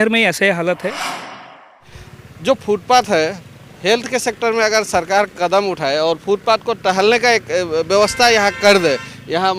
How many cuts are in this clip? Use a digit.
1